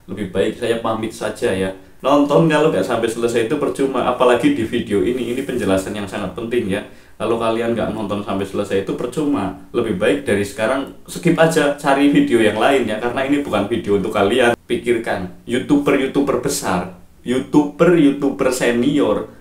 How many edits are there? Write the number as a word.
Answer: two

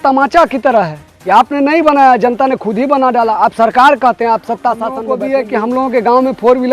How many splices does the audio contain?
one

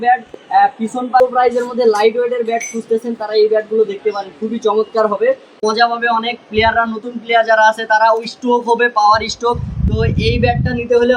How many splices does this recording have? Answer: two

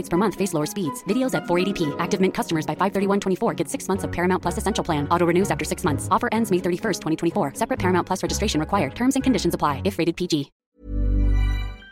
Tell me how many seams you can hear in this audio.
one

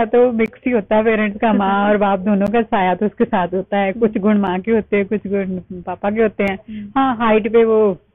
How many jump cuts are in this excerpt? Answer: zero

